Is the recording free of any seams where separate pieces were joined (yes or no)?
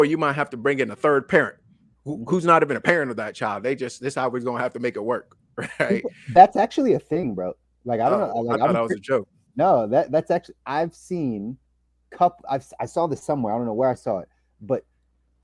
yes